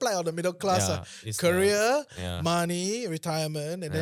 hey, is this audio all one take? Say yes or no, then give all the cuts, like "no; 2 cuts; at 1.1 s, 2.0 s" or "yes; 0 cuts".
yes; 0 cuts